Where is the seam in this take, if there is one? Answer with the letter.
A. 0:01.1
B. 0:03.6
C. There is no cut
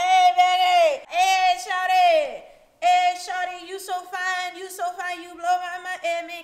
A